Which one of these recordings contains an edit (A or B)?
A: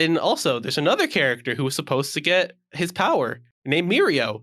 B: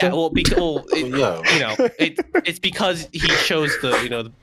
A